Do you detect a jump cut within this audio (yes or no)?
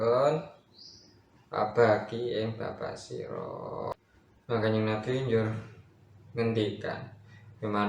yes